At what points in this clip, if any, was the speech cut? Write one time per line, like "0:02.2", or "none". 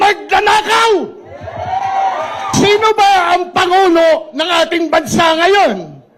0:02.5

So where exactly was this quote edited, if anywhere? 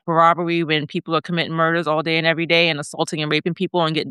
none

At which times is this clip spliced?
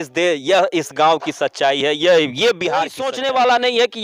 0:03.0

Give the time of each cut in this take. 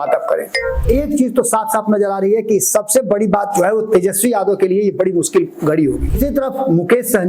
0:00.8
0:06.2

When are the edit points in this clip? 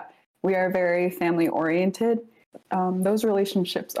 0:02.6

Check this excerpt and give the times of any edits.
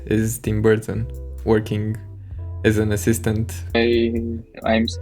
0:03.8

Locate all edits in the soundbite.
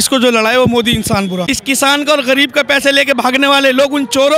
0:01.4

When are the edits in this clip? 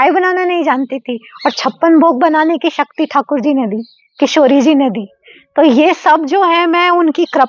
none

